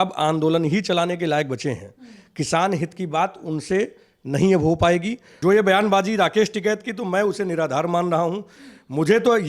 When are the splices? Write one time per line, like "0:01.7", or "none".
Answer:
0:05.2